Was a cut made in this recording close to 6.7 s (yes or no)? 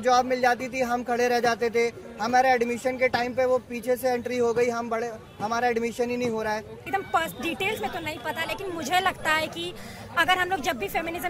yes